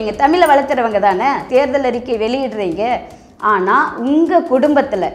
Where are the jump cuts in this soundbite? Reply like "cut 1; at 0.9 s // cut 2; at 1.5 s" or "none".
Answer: cut 1; at 1.4 s